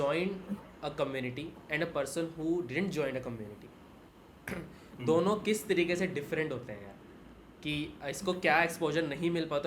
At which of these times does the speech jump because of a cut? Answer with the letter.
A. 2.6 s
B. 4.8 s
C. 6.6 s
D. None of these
D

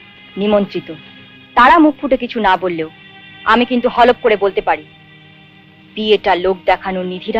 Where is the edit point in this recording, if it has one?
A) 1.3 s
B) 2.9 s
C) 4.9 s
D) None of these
D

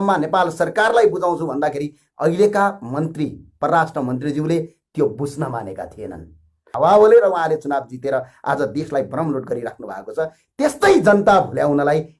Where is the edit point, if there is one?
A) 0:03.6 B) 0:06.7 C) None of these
B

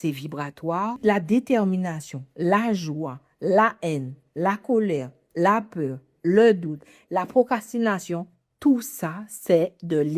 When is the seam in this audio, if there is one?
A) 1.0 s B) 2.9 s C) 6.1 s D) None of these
A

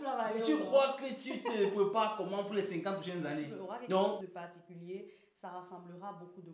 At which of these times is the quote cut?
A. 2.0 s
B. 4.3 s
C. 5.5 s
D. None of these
B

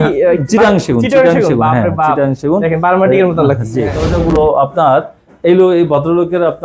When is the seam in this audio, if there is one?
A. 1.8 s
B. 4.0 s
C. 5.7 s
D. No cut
B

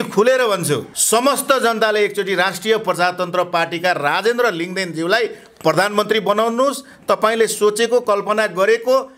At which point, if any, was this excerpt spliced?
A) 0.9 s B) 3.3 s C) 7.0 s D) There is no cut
A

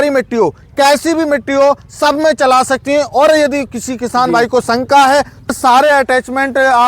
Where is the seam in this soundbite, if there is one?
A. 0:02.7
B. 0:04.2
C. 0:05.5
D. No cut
C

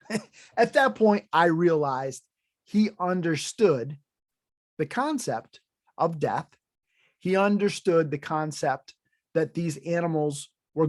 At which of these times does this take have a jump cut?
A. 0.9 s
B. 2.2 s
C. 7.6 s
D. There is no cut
D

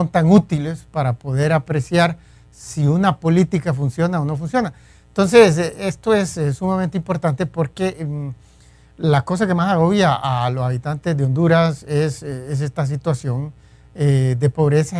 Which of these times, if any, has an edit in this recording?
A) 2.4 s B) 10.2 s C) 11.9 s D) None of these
D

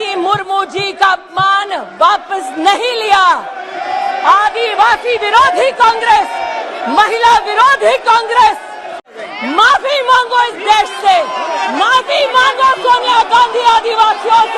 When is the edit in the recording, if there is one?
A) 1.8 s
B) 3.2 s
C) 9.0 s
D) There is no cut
C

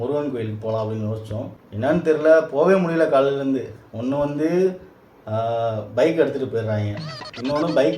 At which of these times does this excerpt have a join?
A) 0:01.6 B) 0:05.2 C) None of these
A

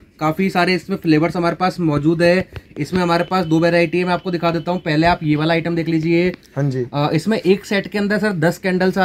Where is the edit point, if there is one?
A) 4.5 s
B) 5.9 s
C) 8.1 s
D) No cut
D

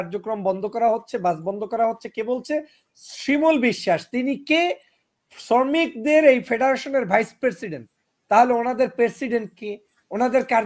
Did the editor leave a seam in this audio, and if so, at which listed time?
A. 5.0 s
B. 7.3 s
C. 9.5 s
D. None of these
D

